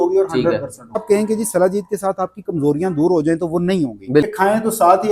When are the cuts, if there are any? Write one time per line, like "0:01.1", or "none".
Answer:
0:01.0
0:04.3